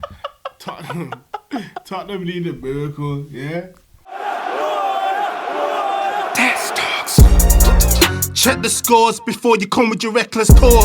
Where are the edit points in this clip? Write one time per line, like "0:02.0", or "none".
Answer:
0:04.1